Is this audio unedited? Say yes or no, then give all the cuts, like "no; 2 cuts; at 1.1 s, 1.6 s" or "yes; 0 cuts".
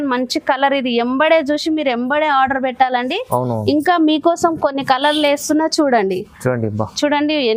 yes; 0 cuts